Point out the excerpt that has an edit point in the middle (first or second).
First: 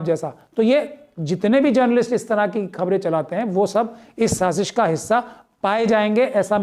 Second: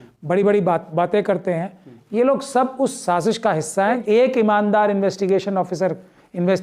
second